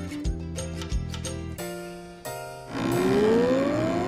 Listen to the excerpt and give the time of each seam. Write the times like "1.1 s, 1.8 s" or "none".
2.6 s